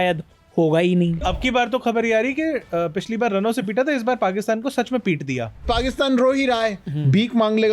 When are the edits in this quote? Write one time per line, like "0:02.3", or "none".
0:01.4
0:05.7